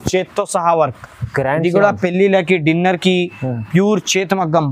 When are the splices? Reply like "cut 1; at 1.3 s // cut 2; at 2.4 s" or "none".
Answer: none